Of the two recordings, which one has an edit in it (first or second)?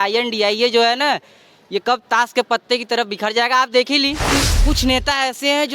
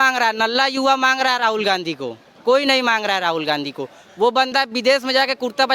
first